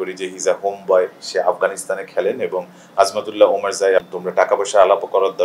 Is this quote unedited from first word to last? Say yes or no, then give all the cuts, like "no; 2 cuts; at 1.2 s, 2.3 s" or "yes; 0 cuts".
no; 1 cut; at 4.1 s